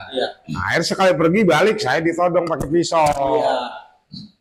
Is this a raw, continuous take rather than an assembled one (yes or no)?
yes